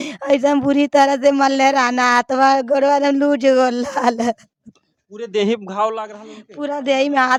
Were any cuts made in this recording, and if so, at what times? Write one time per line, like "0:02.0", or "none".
none